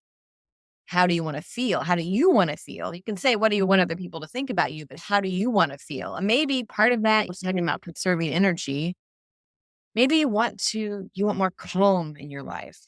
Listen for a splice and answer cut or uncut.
uncut